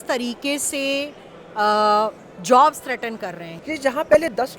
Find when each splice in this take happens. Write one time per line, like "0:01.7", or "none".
0:03.5